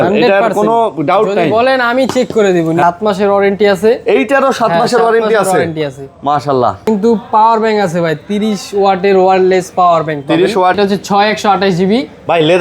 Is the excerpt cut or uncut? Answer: cut